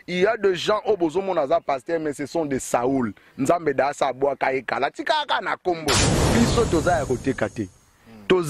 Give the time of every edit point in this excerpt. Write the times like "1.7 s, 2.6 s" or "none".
6.1 s

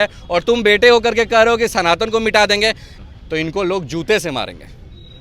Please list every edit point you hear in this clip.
2.9 s

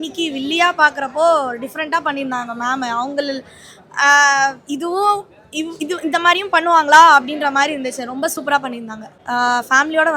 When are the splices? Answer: 9.2 s

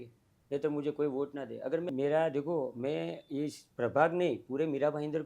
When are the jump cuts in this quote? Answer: 1.9 s

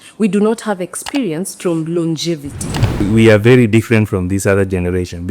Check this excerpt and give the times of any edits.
3.0 s

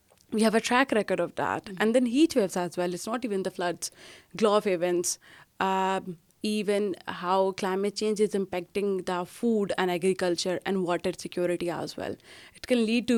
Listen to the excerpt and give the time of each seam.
none

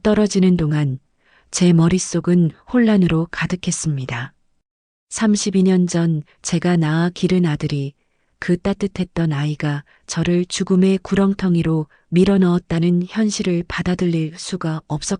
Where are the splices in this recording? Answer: none

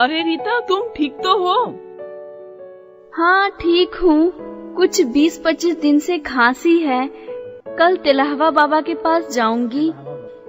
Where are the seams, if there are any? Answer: none

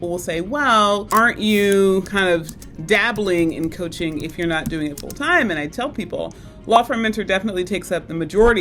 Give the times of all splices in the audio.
1.1 s, 2.1 s

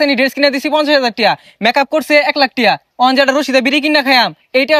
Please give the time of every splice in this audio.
none

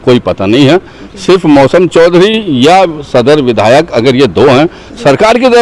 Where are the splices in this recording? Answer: none

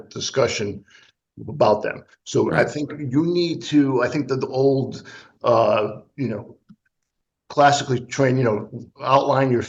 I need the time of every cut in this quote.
none

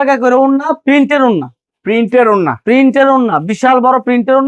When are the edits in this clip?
none

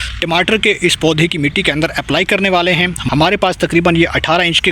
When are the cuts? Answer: 3.0 s

